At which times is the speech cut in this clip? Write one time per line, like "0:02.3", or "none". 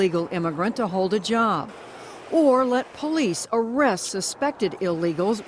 0:04.4